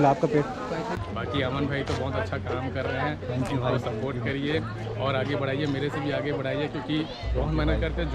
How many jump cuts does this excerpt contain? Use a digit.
1